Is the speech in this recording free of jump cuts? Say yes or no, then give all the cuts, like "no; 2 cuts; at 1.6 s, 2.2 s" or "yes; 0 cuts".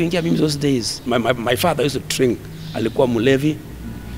no; 1 cut; at 1.0 s